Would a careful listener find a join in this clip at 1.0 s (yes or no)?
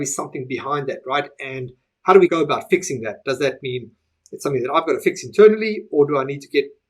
no